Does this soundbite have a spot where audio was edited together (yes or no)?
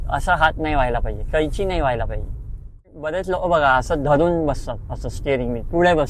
yes